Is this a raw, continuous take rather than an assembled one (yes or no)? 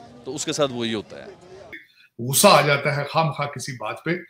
no